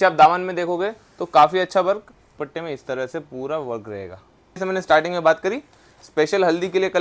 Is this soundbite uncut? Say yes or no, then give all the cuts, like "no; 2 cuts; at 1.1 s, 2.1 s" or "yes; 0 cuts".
no; 2 cuts; at 2.3 s, 4.6 s